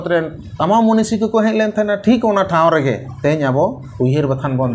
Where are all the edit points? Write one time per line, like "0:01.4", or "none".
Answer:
0:03.1
0:03.8